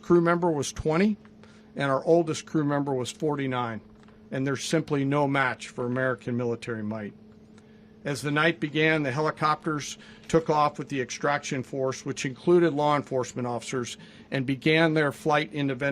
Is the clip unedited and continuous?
yes; 0 cuts

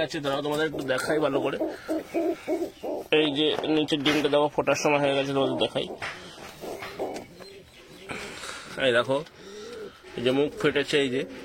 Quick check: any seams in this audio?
no; 0 cuts

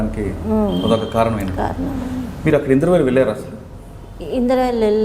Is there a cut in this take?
no; 0 cuts

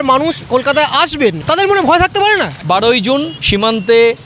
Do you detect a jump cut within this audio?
yes; 2 cuts; at 1.4 s, 2.5 s

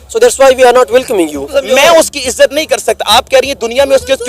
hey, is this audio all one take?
no; 1 cut; at 1.4 s

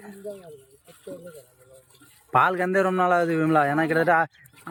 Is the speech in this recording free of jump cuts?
yes; 0 cuts

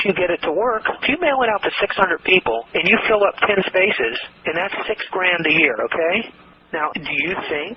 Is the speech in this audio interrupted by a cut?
yes; 2 cuts; at 4.4 s, 6.5 s

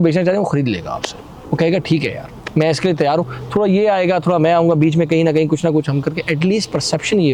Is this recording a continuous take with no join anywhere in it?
yes; 0 cuts

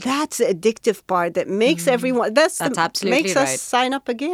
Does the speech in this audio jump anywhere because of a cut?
no; 0 cuts

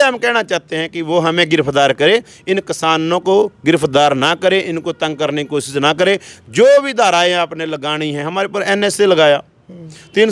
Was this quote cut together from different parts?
no; 0 cuts

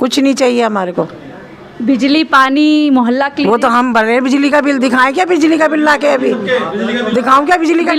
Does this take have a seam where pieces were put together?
no; 0 cuts

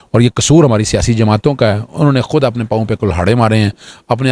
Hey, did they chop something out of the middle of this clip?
no; 0 cuts

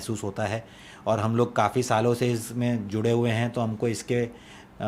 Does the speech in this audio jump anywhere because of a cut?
no; 0 cuts

